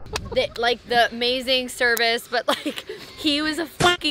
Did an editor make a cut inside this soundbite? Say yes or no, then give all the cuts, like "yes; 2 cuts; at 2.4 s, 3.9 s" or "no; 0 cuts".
no; 0 cuts